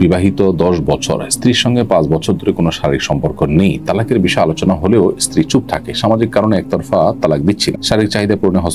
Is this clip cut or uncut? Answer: uncut